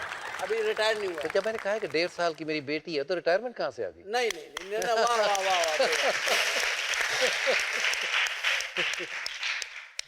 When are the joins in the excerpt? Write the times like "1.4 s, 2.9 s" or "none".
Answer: none